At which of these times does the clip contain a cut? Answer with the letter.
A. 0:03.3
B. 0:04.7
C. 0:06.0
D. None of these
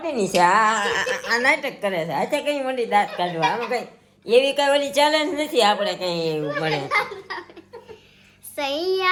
D